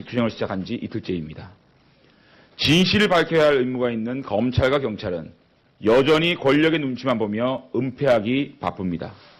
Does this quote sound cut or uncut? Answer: uncut